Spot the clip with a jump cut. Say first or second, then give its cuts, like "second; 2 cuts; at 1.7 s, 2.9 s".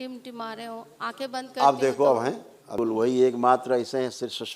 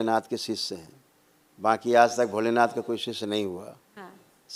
first; 1 cut; at 2.7 s